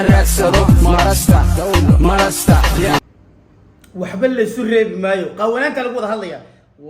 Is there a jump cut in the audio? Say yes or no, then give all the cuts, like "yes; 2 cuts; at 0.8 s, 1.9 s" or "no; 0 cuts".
yes; 1 cut; at 3.0 s